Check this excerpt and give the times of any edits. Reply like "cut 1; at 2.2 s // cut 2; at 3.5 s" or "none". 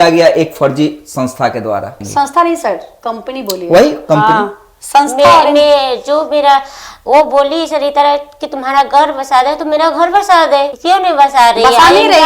none